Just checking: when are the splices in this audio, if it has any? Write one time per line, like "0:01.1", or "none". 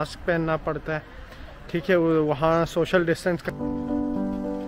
0:03.5